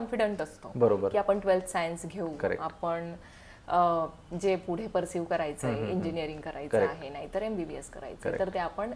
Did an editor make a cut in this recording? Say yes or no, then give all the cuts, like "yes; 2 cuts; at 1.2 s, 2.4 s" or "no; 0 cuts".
no; 0 cuts